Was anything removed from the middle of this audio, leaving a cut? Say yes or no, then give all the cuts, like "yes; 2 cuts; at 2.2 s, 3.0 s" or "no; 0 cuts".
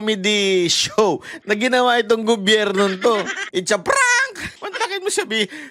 yes; 3 cuts; at 1.3 s, 3.4 s, 4.6 s